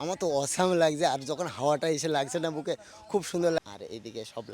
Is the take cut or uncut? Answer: cut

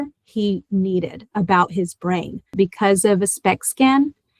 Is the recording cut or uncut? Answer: cut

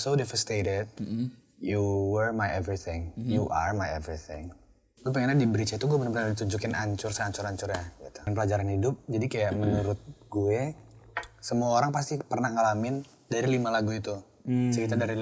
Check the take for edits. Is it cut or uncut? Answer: cut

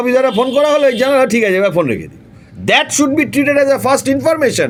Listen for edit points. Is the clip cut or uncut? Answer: uncut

